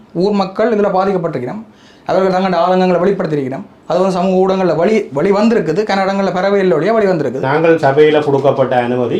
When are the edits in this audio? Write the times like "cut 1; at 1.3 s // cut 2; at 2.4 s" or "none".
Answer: cut 1; at 7.4 s